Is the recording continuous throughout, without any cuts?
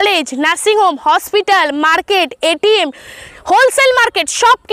yes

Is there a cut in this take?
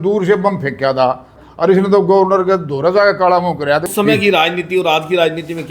yes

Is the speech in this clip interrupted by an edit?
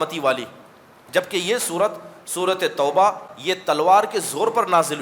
yes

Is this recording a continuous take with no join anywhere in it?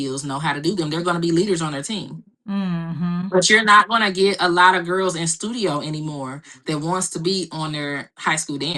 yes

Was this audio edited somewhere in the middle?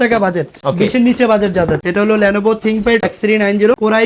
yes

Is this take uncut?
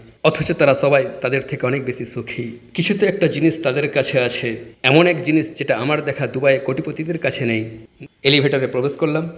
no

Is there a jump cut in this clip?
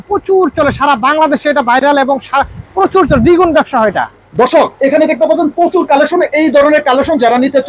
no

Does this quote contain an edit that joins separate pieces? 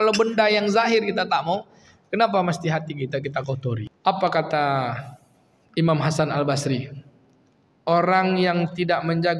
yes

